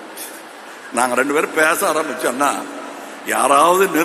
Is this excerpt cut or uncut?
uncut